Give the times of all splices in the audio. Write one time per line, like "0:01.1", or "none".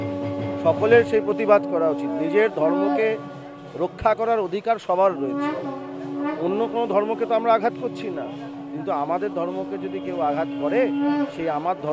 none